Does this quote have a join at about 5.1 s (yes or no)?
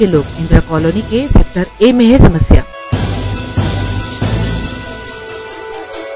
no